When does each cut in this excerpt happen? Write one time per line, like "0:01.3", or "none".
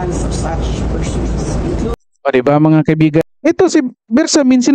0:03.2